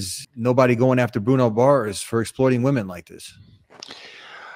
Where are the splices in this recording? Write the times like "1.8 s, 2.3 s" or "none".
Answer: none